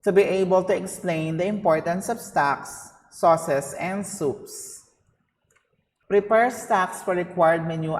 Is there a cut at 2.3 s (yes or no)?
no